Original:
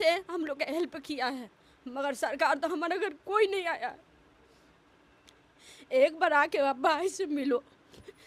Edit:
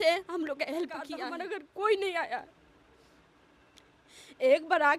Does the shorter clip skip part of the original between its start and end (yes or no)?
yes